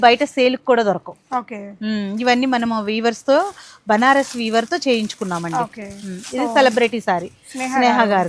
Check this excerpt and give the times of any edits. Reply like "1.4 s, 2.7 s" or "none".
none